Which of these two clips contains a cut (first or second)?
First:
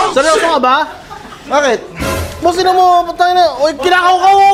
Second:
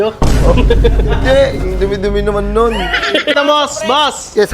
second